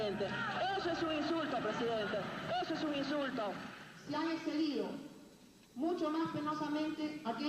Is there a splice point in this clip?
yes; 1 cut; at 4.7 s

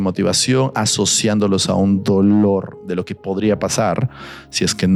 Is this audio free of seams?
yes; 0 cuts

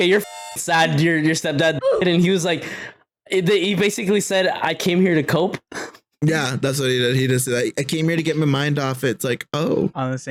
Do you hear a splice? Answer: no; 0 cuts

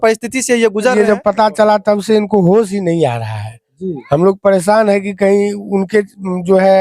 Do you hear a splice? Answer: yes; 1 cut; at 0.9 s

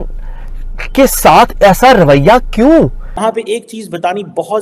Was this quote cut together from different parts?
yes; 1 cut; at 3.2 s

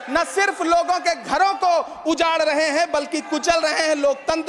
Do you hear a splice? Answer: no; 0 cuts

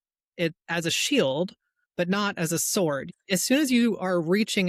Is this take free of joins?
no; 1 cut; at 3.1 s

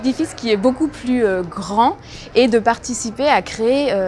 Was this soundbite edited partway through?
no; 0 cuts

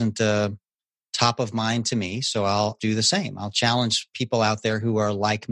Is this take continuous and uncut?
no; 1 cut; at 2.8 s

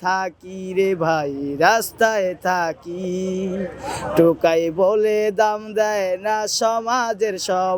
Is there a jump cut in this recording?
no; 0 cuts

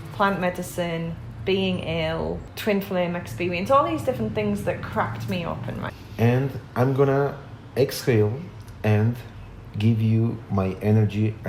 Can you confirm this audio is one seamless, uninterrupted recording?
no; 2 cuts; at 2.5 s, 5.9 s

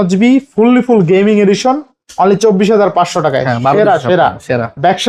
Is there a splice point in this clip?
no; 0 cuts

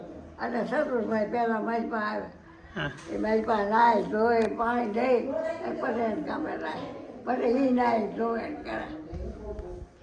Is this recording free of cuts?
yes; 0 cuts

